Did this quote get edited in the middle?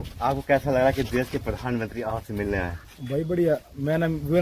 no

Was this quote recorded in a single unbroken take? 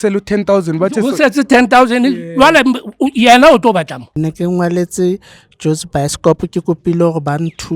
no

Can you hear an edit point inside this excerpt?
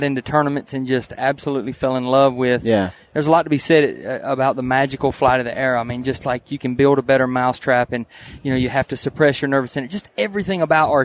no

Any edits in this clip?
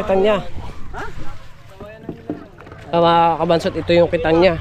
no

